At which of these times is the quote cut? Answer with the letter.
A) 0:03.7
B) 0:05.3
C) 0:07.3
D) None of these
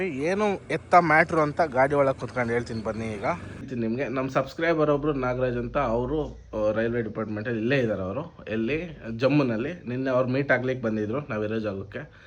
A